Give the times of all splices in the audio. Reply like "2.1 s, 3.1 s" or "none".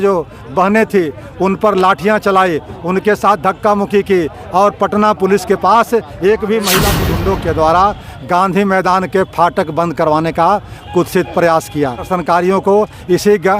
7.0 s, 12.1 s